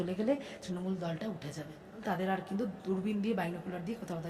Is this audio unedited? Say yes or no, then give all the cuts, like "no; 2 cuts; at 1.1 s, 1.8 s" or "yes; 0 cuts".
no; 1 cut; at 2.0 s